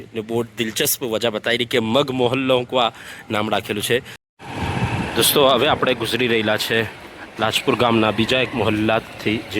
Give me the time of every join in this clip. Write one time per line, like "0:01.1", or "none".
0:04.2